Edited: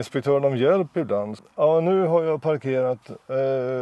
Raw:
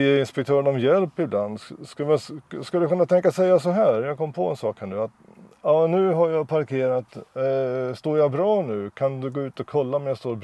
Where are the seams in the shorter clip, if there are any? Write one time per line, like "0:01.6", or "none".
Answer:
0:01.4